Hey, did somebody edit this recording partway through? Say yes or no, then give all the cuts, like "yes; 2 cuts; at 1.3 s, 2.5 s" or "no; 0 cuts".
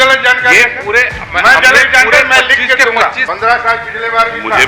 yes; 1 cut; at 3.2 s